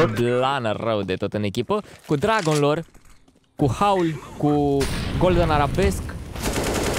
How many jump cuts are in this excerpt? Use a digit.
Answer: 0